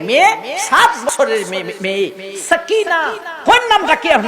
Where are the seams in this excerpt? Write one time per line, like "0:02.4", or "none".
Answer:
0:01.1